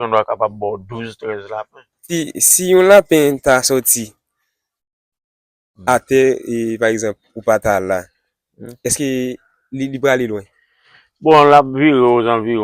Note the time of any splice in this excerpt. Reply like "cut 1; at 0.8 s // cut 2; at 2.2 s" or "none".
cut 1; at 2.1 s